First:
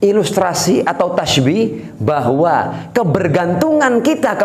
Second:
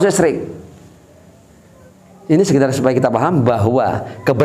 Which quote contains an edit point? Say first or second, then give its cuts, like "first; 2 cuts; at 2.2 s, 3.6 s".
second; 1 cut; at 1.9 s